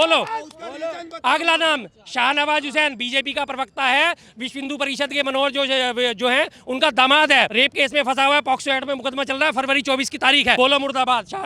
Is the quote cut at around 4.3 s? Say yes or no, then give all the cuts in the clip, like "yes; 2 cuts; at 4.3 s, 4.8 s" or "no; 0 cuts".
no; 2 cuts; at 7.5 s, 10.6 s